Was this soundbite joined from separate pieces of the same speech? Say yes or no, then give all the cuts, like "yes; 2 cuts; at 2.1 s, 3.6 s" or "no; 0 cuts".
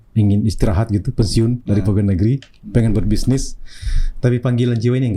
no; 0 cuts